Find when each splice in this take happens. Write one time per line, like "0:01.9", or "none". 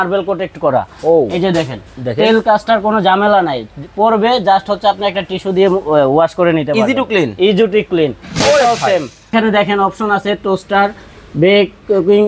0:09.3